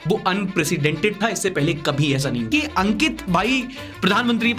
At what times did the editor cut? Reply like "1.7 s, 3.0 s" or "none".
2.5 s